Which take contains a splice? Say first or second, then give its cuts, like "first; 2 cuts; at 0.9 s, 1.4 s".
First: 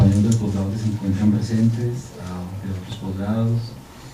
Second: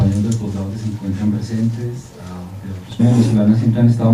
first; 1 cut; at 3.0 s